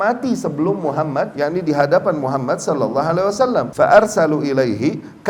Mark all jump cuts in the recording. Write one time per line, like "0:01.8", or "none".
0:01.3
0:03.7